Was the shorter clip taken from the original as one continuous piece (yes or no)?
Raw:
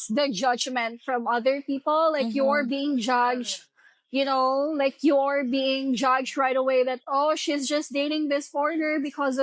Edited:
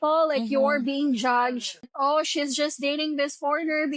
no